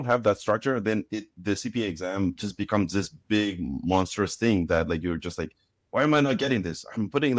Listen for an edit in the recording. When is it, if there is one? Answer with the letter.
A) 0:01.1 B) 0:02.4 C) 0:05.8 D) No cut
D